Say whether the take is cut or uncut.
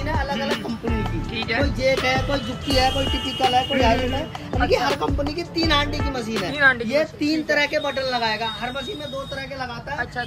uncut